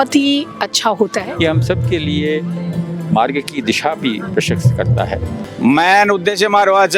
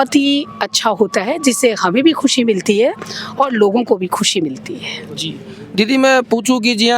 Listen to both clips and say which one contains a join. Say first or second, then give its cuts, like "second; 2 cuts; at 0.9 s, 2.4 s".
first; 2 cuts; at 1.2 s, 5.4 s